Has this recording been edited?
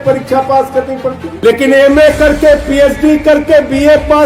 yes; 1 cut; at 1.3 s

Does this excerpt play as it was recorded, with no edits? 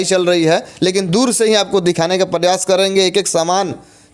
yes; 0 cuts

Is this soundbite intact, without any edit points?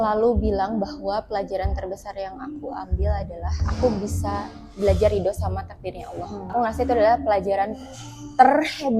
no; 2 cuts; at 3.6 s, 6.5 s

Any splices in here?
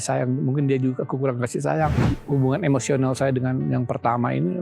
yes; 1 cut; at 2.1 s

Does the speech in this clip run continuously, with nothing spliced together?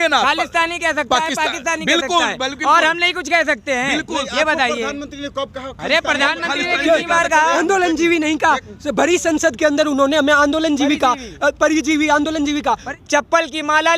no; 1 cut; at 12.9 s

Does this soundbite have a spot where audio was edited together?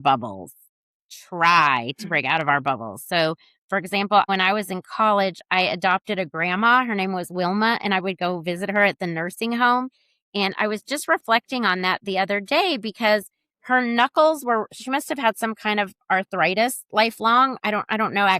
yes; 1 cut; at 4.3 s

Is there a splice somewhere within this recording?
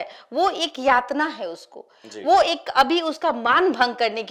no; 0 cuts

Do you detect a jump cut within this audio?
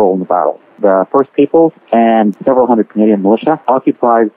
no; 0 cuts

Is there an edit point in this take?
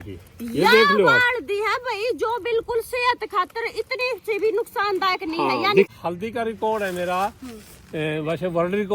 yes; 1 cut; at 5.9 s

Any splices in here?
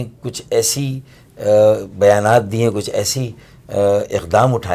no; 0 cuts

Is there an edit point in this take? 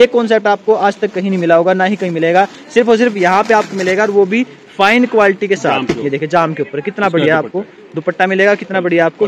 no; 0 cuts

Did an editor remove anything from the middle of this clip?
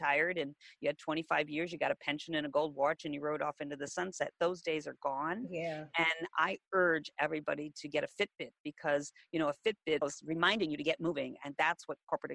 yes; 1 cut; at 10.0 s

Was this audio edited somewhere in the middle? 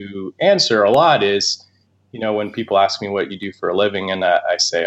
no; 0 cuts

